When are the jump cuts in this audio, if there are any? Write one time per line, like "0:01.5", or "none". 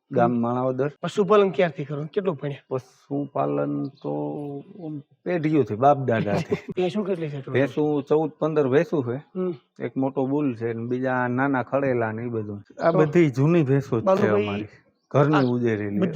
0:01.0
0:06.7
0:12.6